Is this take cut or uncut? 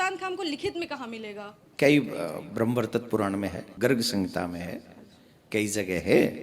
cut